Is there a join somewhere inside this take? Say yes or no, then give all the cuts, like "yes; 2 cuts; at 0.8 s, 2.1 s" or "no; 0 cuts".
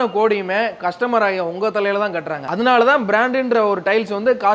no; 0 cuts